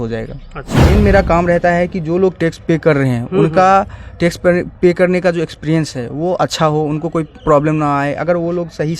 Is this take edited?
yes; 1 cut; at 0.9 s

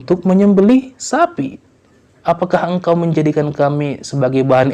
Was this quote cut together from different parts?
no; 0 cuts

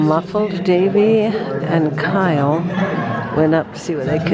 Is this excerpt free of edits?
yes; 0 cuts

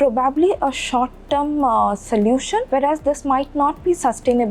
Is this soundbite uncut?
no; 1 cut; at 2.7 s

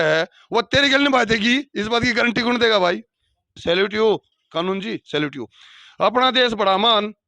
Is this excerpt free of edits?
no; 1 cut; at 3.6 s

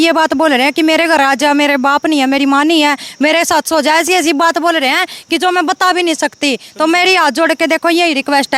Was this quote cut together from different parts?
no; 0 cuts

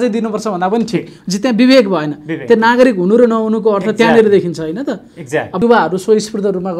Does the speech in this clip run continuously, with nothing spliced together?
no; 1 cut; at 5.6 s

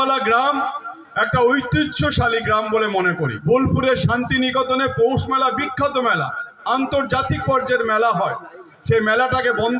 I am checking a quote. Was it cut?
yes; 1 cut; at 3.4 s

